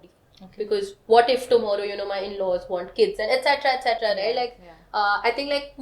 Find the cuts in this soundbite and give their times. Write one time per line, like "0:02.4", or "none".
none